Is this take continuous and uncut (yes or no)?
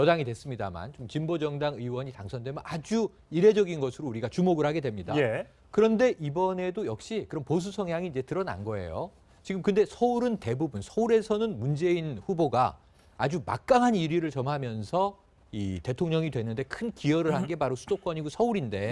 yes